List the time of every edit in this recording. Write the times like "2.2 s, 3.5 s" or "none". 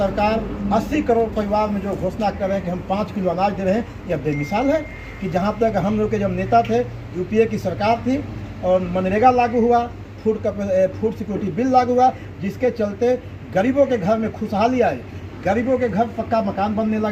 none